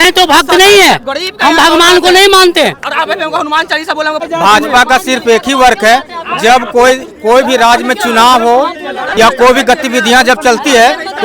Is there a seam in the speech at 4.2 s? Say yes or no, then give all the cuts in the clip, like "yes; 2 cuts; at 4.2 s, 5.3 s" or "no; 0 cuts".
no; 0 cuts